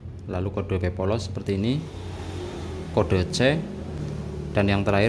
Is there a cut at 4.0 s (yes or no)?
yes